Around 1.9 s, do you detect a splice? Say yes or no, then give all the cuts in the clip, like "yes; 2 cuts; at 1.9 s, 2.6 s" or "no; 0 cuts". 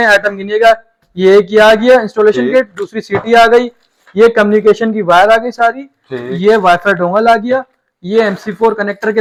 no; 0 cuts